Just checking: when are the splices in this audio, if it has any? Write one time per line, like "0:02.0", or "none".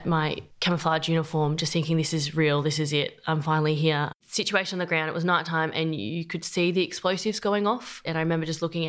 0:04.2
0:08.0